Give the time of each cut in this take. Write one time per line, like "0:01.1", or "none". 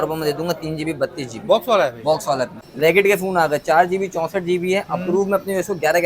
0:02.6